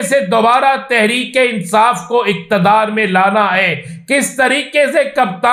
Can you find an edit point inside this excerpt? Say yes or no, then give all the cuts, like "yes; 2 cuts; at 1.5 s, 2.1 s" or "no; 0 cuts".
no; 0 cuts